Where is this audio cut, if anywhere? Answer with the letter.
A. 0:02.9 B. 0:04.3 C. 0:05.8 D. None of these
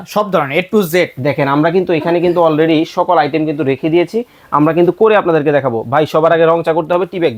D